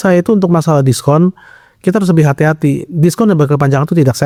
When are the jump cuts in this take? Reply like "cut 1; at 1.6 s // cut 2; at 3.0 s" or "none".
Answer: none